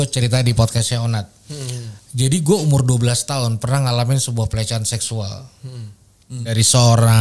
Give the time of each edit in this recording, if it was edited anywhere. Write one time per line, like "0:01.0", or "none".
none